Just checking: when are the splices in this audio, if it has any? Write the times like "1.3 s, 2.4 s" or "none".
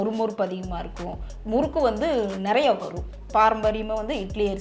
3.2 s